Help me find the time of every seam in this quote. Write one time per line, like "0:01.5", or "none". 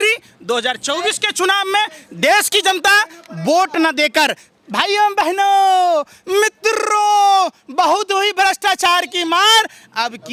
none